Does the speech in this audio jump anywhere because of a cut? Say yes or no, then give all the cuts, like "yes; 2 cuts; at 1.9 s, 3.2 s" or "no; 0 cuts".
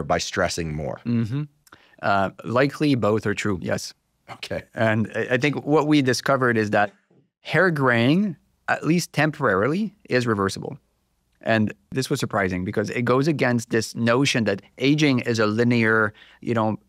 no; 0 cuts